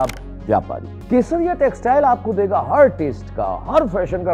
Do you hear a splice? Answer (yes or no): yes